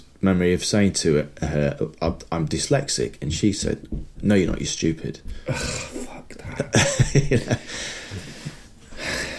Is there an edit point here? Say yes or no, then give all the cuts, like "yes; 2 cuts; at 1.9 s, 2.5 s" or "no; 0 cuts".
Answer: no; 0 cuts